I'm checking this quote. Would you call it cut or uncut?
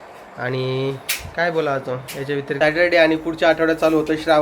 cut